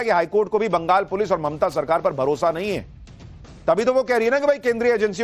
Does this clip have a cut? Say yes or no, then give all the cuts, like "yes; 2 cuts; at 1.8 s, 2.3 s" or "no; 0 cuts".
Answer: no; 0 cuts